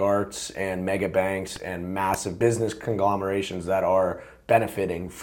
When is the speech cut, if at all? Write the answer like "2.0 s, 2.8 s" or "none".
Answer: 2.3 s